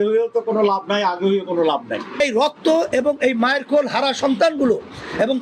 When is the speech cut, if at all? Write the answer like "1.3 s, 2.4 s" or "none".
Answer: 2.2 s